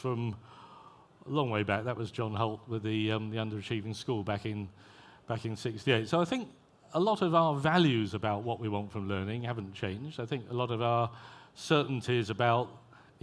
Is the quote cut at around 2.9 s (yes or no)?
yes